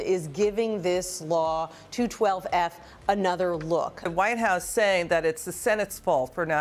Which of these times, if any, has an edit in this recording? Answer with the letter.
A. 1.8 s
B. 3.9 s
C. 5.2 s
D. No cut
B